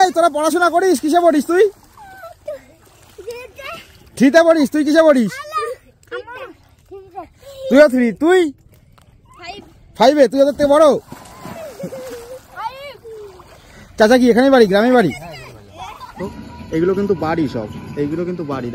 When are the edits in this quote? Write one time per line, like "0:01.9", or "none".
0:16.2